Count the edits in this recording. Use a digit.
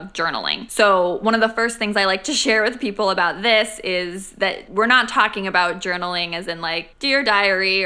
0